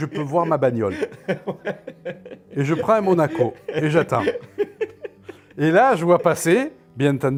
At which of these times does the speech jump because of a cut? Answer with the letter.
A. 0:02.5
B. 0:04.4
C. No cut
C